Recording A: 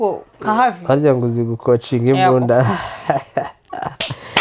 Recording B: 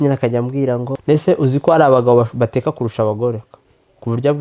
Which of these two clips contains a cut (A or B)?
B